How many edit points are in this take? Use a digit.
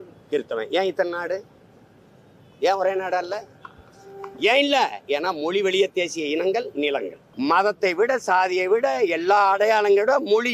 1